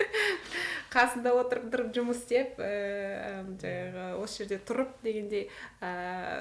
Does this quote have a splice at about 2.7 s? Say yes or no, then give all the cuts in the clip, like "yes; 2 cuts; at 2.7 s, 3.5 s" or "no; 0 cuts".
no; 0 cuts